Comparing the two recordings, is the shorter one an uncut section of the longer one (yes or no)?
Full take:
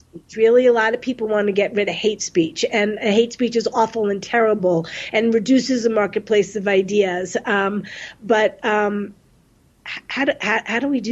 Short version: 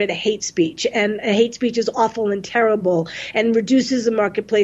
yes